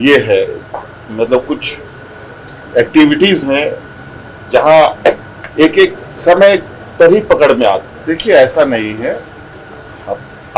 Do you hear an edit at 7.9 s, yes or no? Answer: yes